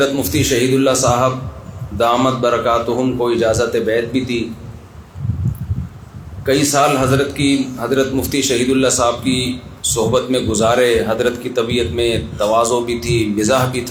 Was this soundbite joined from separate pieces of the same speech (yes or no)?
no